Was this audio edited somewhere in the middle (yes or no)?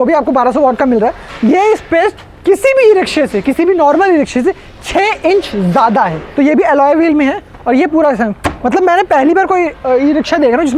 yes